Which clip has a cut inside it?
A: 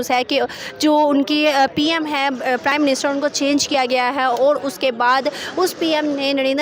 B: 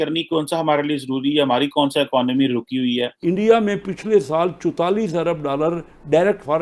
B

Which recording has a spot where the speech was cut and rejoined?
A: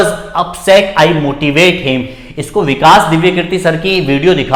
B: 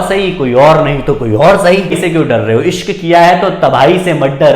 B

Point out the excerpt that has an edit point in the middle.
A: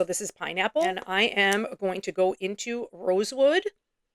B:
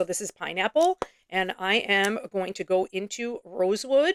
A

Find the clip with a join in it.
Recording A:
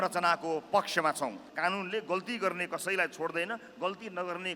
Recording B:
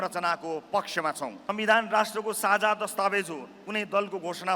A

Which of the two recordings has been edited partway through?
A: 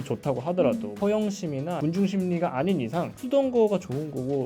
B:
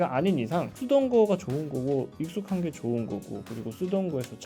A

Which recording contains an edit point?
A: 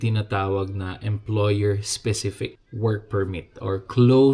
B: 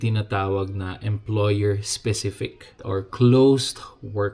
B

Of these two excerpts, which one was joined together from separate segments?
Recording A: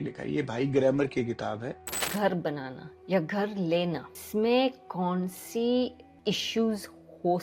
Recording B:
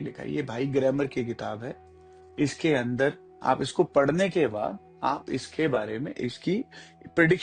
A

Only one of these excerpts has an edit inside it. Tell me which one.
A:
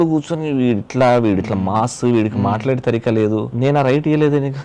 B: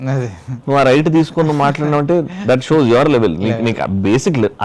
A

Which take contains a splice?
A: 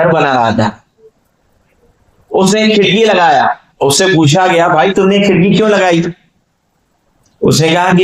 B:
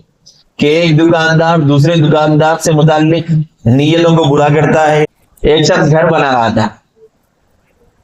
B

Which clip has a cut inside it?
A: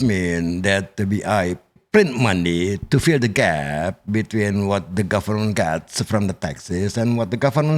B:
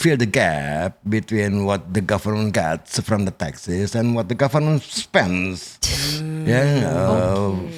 A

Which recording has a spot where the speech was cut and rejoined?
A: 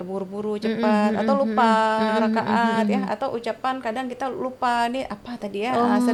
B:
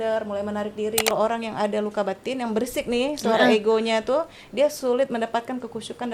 B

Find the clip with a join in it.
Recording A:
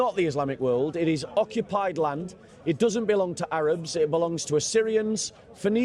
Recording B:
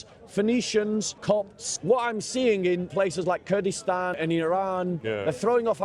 B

